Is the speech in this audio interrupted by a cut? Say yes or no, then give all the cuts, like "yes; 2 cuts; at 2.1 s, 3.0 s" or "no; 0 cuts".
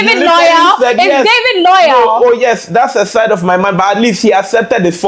no; 0 cuts